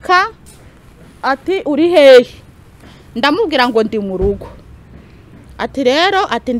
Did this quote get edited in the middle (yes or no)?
no